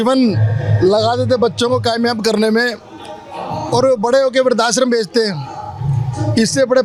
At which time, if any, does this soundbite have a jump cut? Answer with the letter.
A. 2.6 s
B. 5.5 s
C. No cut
C